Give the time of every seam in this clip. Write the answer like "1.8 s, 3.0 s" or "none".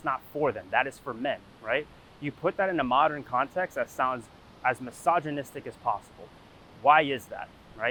none